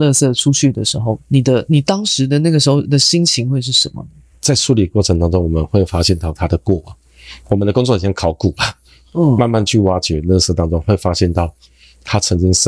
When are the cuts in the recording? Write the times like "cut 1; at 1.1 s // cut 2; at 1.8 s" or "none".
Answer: cut 1; at 4.2 s